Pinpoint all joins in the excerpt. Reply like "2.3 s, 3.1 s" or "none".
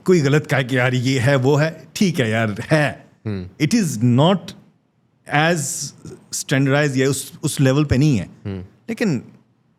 none